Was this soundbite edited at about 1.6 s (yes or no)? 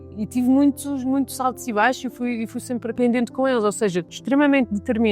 no